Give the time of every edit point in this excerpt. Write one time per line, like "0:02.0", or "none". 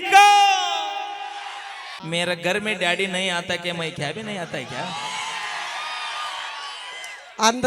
0:01.9